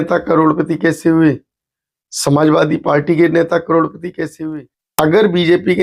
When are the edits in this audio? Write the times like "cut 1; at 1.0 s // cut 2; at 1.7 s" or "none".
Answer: cut 1; at 4.4 s